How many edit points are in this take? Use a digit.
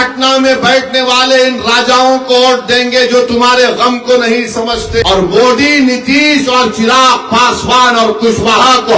1